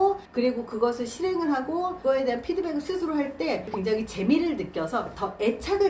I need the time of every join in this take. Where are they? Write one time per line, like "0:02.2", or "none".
0:02.0
0:03.7